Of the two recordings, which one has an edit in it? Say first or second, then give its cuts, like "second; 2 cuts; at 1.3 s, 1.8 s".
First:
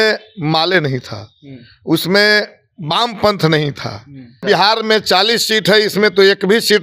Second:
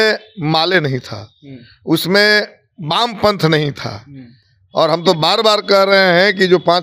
first; 1 cut; at 4.4 s